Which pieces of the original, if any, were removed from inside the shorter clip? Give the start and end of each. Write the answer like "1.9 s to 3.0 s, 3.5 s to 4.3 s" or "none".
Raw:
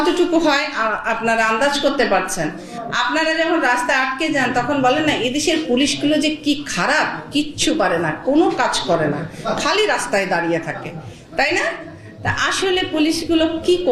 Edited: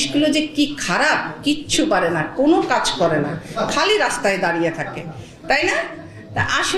none